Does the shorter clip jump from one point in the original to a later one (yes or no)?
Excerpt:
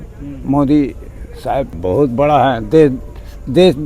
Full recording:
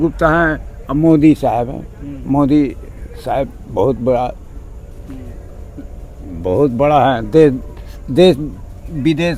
yes